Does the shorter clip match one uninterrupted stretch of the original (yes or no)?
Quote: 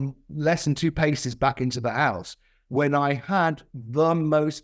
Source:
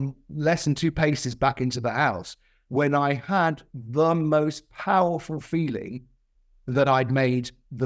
yes